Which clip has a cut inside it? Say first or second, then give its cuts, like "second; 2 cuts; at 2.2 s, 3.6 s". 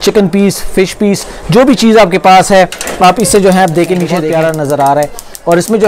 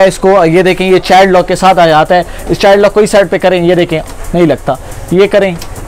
first; 1 cut; at 4.3 s